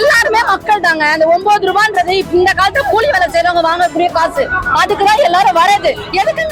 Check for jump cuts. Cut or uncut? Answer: uncut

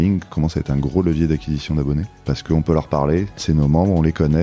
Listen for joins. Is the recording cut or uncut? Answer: cut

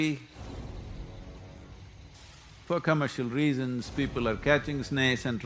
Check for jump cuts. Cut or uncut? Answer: cut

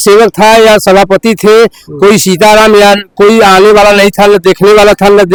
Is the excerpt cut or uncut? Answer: uncut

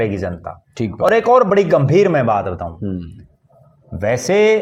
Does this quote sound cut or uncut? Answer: uncut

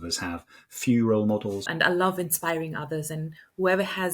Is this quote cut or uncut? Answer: cut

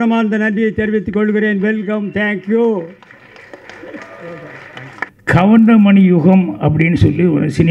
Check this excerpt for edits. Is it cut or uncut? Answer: cut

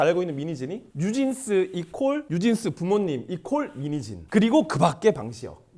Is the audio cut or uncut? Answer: cut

